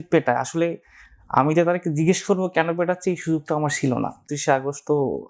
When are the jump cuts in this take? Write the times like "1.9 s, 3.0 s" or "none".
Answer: 4.3 s